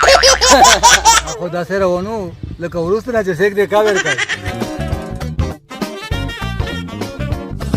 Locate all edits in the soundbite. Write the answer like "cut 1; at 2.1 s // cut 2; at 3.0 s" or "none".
cut 1; at 1.3 s // cut 2; at 4.4 s

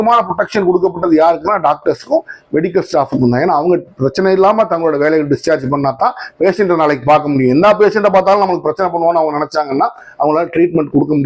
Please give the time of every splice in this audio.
none

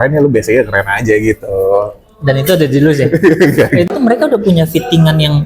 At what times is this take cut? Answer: cut 1; at 3.9 s

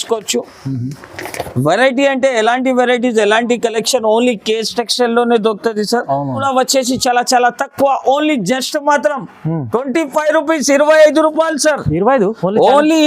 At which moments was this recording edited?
cut 1; at 6.4 s

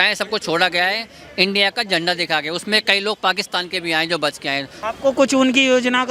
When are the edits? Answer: cut 1; at 4.7 s

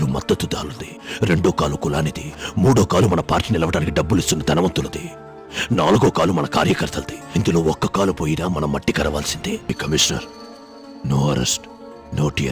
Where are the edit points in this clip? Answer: cut 1; at 9.6 s

